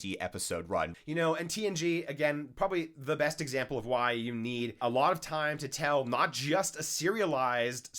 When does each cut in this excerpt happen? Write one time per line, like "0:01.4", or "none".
0:01.0
0:04.8

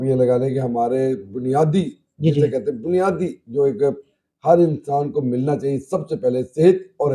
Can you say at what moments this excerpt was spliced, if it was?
none

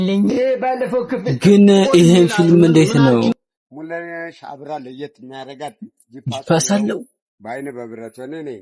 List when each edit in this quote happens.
0:03.3

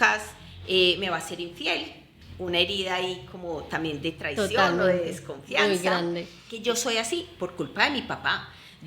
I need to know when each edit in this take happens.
0:06.5

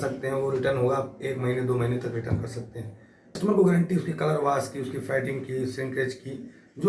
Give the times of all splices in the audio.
0:03.4

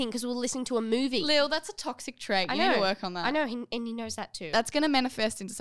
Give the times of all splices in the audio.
none

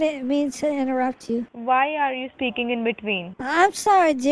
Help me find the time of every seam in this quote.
0:01.5
0:03.3

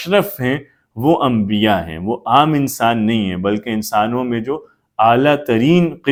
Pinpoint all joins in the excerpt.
none

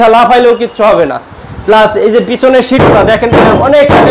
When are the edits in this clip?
none

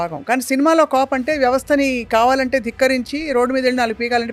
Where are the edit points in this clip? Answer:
none

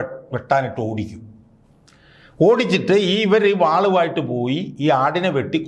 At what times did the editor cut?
none

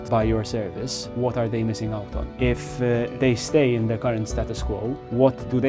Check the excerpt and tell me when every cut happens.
none

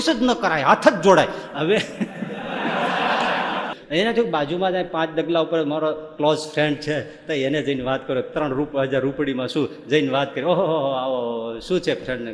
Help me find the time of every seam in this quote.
0:03.8

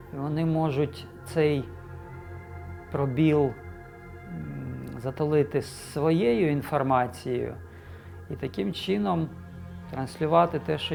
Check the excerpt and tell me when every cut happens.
none

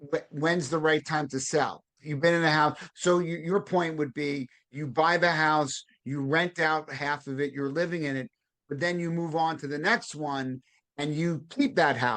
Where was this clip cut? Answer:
none

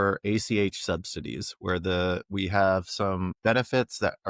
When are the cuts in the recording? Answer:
0:03.3

